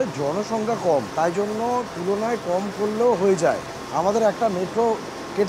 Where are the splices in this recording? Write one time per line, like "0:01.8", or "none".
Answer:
0:01.1
0:03.7